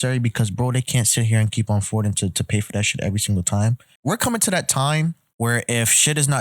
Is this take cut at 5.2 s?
yes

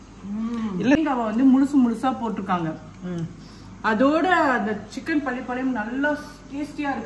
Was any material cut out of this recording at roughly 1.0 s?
yes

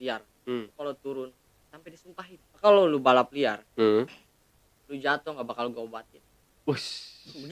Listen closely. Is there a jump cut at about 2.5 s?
yes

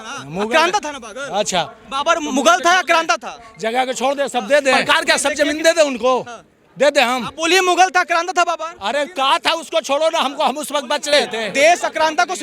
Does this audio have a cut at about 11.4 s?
yes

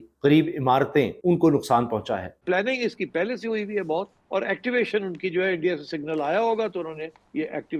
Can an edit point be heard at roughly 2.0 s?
no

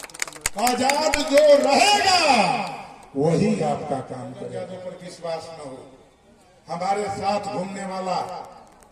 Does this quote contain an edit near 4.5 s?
yes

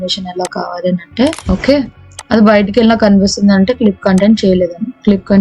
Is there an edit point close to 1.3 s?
yes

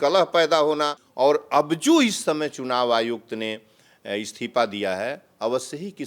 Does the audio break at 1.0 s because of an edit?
yes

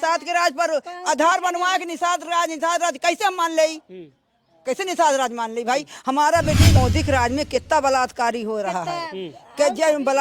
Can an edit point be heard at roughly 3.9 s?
no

